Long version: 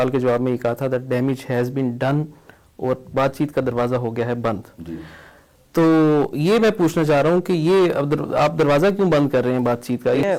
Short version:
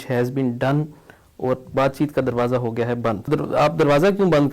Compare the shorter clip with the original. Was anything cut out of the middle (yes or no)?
yes